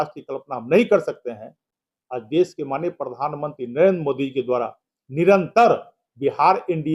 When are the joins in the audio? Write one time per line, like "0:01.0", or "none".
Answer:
none